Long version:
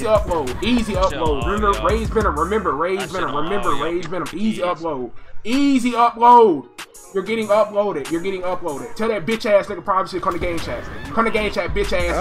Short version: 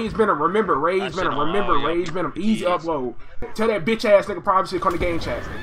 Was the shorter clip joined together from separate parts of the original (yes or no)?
yes